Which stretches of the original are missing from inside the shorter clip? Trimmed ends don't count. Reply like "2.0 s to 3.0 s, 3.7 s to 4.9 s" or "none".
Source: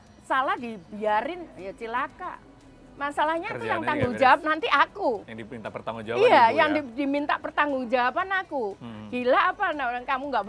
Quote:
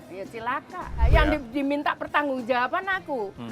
2.6 s to 6.5 s